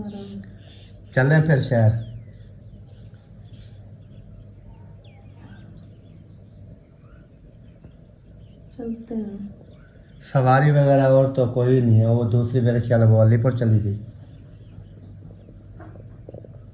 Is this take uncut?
yes; 0 cuts

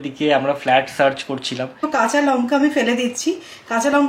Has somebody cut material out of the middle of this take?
yes; 1 cut; at 1.8 s

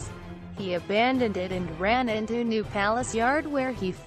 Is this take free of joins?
no; 1 cut; at 2.4 s

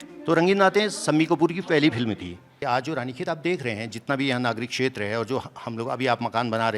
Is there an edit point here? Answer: yes; 1 cut; at 2.5 s

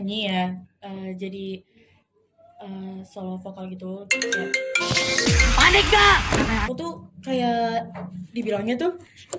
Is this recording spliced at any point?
yes; 1 cut; at 6.6 s

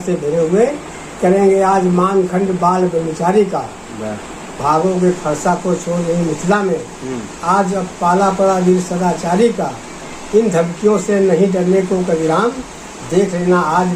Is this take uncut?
yes; 0 cuts

